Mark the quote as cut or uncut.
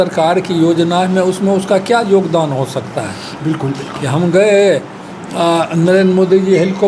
uncut